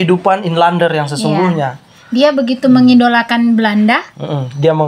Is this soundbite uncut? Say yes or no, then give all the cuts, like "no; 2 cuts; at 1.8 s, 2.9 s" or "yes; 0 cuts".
yes; 0 cuts